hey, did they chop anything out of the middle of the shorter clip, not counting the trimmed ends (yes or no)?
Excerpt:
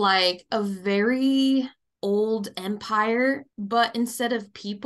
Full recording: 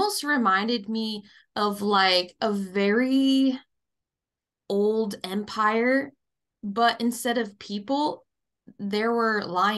yes